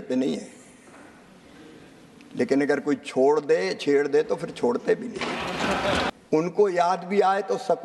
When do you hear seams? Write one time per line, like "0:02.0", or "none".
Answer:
0:06.1